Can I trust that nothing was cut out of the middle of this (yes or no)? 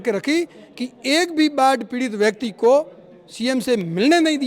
yes